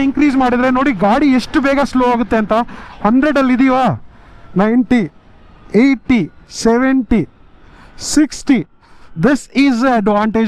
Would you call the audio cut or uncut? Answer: uncut